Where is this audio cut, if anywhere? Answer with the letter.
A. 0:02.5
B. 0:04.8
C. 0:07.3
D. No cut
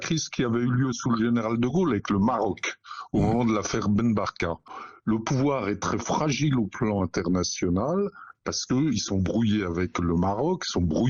B